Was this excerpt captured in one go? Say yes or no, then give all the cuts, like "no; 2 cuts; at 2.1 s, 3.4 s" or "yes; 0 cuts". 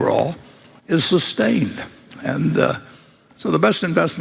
yes; 0 cuts